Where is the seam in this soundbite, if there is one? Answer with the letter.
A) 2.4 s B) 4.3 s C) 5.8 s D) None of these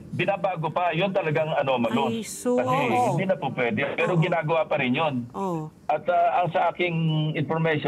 D